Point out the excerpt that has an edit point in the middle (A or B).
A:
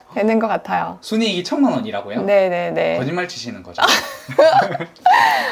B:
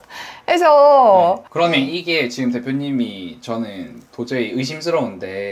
B